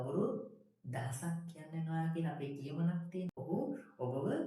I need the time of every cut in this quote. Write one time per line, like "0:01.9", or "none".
0:03.4